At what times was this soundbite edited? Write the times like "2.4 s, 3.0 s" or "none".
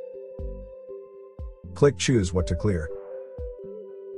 none